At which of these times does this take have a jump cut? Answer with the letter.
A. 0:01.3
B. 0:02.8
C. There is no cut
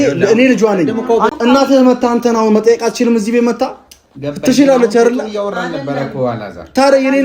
A